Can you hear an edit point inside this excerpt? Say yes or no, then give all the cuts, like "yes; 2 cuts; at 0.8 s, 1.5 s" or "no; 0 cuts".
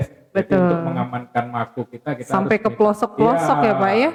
no; 0 cuts